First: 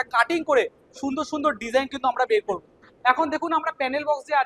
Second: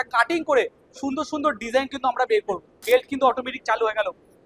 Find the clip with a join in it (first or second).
second